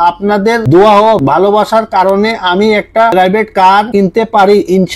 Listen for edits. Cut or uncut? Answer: uncut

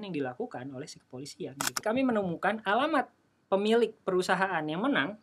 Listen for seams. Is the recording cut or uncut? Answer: cut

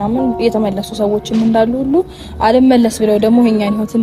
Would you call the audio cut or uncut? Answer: uncut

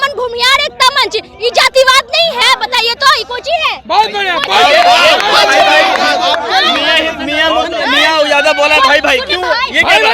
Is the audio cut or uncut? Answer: uncut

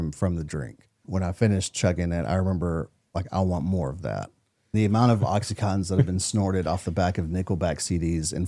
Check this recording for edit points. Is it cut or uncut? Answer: cut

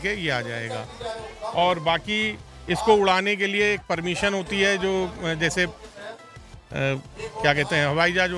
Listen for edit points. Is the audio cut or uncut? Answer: uncut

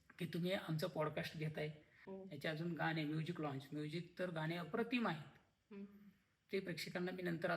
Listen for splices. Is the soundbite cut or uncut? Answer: cut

